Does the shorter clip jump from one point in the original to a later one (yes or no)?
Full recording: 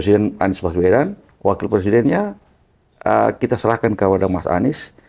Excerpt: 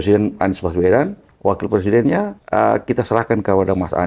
yes